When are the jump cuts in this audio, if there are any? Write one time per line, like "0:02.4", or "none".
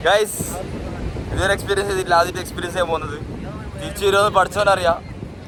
none

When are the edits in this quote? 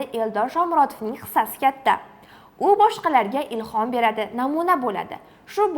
none

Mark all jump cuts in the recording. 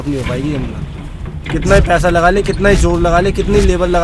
none

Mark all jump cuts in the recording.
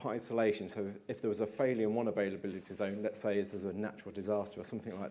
none

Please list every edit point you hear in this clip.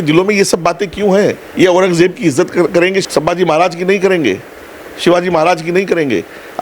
0:03.0

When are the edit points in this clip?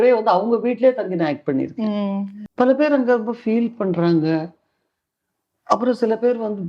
0:02.4

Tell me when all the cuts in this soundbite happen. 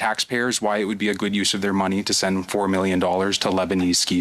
none

